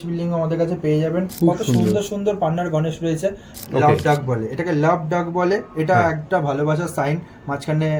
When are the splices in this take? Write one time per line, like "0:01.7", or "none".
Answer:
0:01.3
0:03.5